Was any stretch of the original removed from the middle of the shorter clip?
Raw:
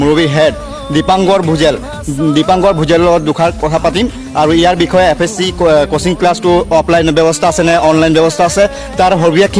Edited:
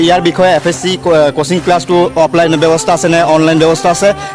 no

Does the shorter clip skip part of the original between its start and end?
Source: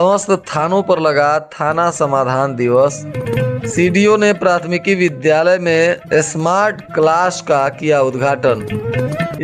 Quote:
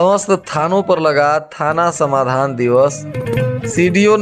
no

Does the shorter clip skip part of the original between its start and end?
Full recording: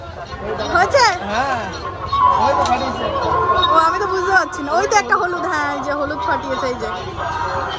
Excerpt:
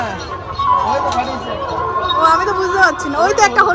no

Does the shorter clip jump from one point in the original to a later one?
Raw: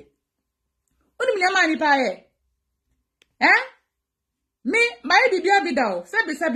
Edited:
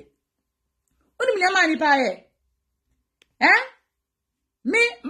no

